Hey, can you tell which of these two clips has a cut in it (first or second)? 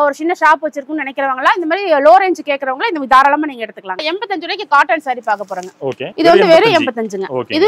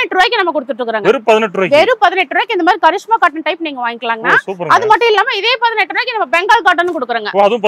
first